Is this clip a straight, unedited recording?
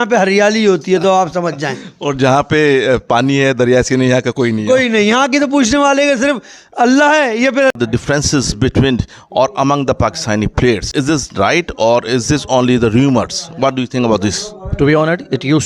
no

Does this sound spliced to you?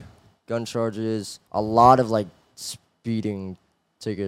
yes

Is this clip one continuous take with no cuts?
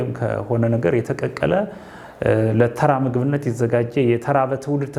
yes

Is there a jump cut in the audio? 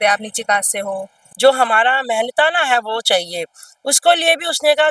yes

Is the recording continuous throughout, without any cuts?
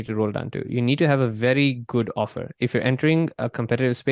yes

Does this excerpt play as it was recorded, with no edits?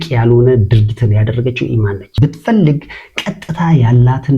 no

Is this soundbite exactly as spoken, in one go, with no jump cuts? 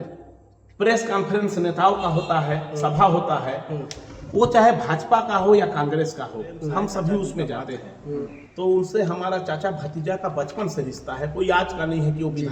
no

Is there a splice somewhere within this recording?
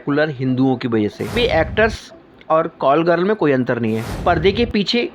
yes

